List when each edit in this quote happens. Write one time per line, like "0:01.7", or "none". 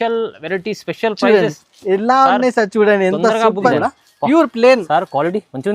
0:03.7